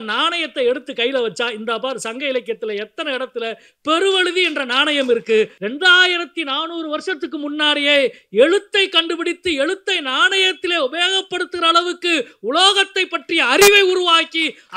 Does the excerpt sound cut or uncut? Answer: cut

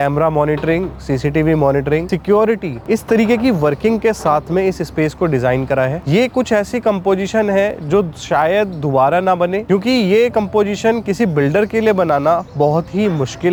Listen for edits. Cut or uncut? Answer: uncut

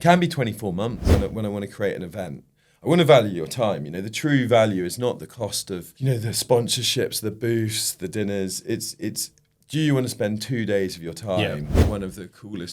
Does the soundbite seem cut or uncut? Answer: cut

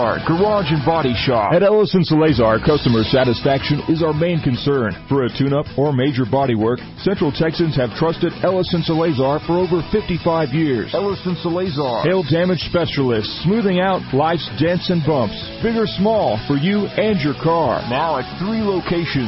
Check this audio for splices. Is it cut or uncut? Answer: uncut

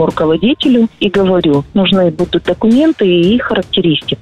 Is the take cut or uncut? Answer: cut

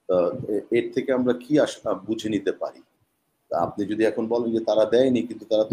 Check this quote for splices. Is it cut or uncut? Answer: uncut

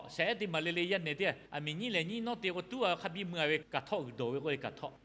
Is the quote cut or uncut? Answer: cut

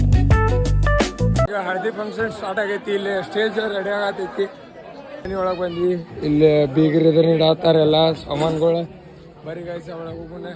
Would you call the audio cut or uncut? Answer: cut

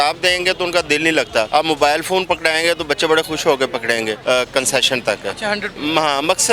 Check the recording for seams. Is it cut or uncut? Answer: cut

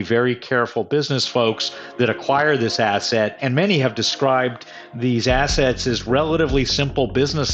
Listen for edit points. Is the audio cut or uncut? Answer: cut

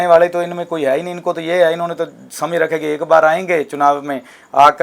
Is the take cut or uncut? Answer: uncut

